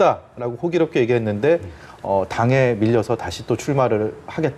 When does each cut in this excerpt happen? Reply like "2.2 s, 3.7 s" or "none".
none